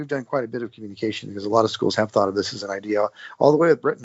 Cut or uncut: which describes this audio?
uncut